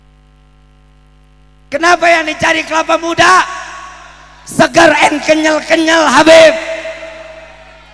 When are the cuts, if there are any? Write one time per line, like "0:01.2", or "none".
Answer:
0:01.1